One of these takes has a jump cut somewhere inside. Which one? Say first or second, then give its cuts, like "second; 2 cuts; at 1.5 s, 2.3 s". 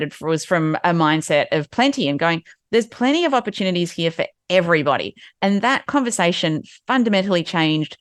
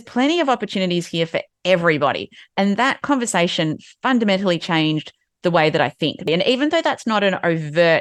second; 1 cut; at 6.3 s